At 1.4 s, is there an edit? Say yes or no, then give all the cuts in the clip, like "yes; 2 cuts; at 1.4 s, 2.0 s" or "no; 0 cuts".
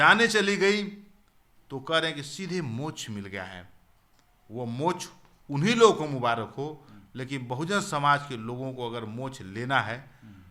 no; 0 cuts